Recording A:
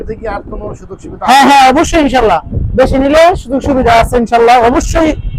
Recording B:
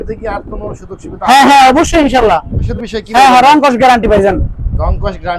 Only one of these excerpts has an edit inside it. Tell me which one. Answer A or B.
B